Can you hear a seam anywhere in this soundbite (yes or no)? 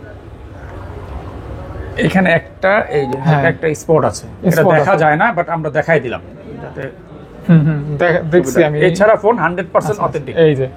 no